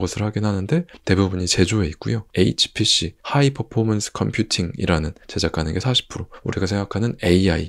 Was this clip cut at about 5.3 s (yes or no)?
yes